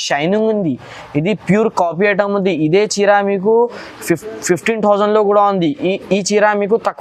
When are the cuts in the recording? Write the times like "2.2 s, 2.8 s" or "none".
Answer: none